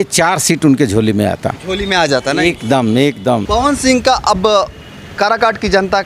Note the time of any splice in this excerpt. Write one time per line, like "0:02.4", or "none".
0:03.4